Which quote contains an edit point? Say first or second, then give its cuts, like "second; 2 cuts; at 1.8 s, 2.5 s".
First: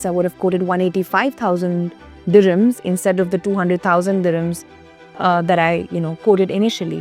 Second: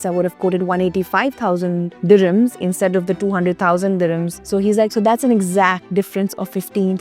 second; 3 cuts; at 1.9 s, 4.3 s, 5.8 s